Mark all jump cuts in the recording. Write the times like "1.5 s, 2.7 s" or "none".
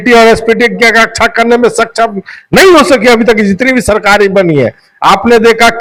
none

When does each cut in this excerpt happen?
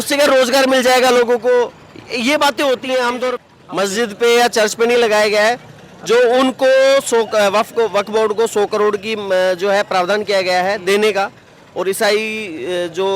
3.4 s

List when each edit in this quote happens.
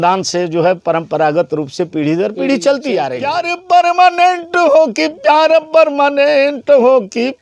3.5 s

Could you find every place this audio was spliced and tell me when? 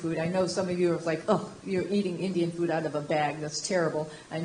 none

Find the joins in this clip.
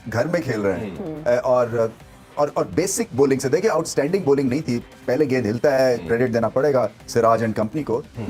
none

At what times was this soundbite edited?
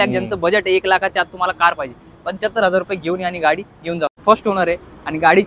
4.2 s

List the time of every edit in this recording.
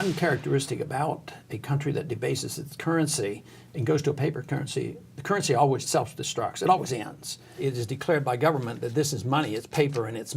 5.8 s, 7.6 s

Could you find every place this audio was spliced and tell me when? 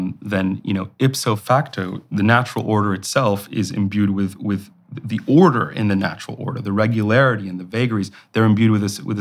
1.4 s

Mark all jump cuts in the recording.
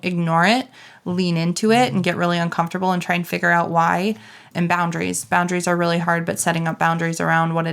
4.5 s

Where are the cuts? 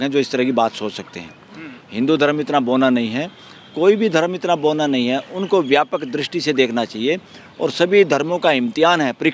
none

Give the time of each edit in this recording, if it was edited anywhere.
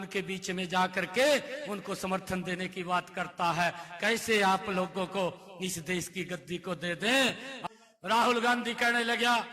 7.5 s

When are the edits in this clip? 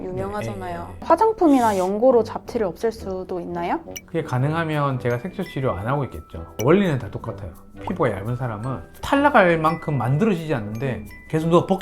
0.9 s, 7.7 s

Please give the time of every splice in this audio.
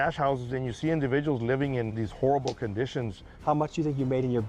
2.0 s, 3.3 s

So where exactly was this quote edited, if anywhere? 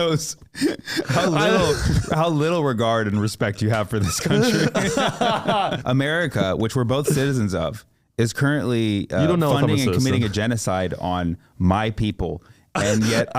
5.8 s

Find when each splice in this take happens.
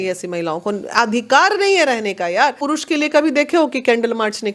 2.6 s

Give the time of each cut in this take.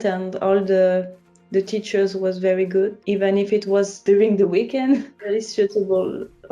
3.0 s, 4.0 s, 5.1 s

